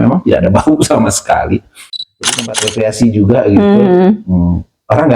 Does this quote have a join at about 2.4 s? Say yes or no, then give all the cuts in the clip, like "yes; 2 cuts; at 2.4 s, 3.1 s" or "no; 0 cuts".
yes; 1 cut; at 2.4 s